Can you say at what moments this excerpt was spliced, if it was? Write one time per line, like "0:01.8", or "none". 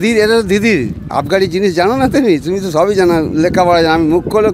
none